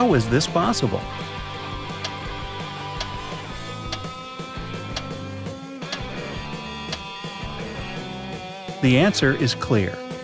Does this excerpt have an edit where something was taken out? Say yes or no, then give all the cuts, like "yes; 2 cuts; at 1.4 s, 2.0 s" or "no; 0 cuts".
yes; 1 cut; at 1.2 s